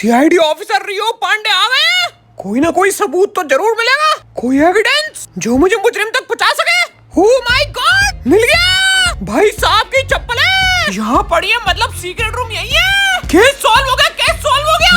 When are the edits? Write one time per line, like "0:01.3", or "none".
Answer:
none